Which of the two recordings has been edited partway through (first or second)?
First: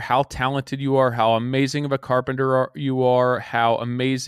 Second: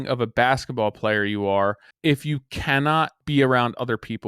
second